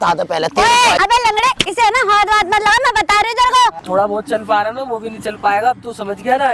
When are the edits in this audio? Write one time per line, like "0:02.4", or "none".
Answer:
0:01.0
0:03.8